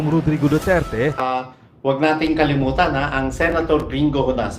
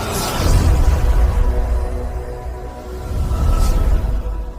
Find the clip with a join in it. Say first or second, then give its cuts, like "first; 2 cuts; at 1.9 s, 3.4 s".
first; 1 cut; at 1.4 s